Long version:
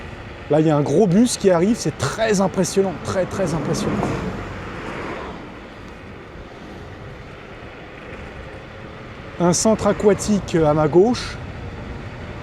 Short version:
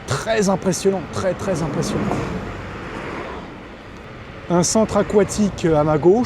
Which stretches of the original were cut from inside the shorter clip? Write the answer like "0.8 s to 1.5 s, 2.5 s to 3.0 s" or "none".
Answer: 6.0 s to 9.0 s